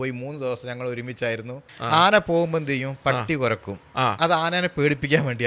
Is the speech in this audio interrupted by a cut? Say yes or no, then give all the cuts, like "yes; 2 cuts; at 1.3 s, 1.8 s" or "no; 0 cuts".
yes; 1 cut; at 1.7 s